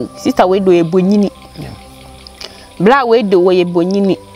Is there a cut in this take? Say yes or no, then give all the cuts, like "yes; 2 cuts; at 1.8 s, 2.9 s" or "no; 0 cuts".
no; 0 cuts